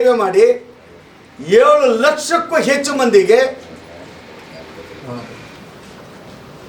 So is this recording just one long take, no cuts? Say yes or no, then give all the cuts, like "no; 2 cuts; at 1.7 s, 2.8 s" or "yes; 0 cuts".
yes; 0 cuts